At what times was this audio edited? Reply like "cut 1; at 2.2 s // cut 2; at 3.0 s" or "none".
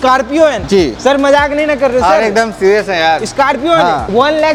none